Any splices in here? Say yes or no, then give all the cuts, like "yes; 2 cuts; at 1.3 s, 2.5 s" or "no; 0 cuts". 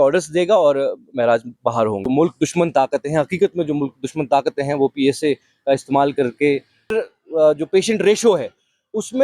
yes; 2 cuts; at 2.0 s, 6.9 s